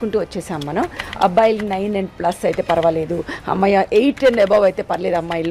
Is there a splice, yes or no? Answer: no